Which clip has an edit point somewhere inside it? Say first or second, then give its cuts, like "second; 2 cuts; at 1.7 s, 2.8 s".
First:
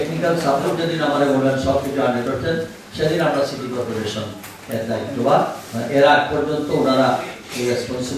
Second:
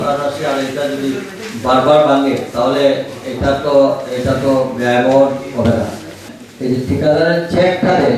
second; 1 cut; at 6.3 s